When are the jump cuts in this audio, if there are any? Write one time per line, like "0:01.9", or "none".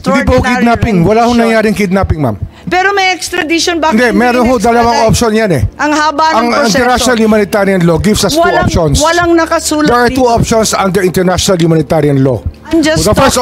none

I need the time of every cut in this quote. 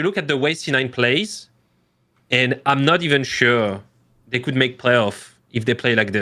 none

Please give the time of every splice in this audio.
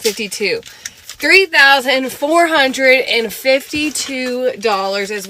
none

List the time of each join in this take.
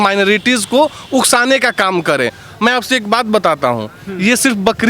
none

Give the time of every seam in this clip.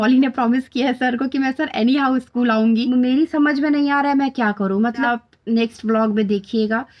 0:02.8
0:05.0

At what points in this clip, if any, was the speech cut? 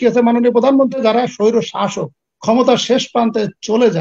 0:01.0

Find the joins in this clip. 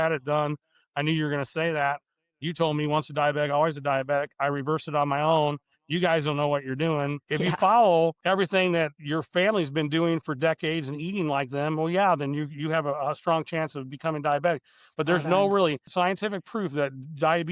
0:07.2
0:08.2
0:09.0
0:15.8

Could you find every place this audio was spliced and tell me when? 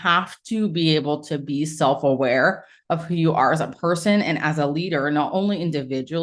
none

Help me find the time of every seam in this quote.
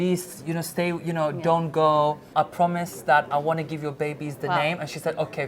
0:02.2

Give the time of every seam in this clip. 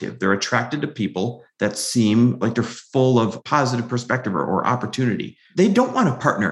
0:02.4
0:03.4

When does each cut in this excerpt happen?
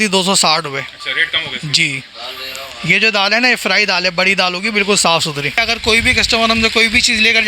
0:05.6

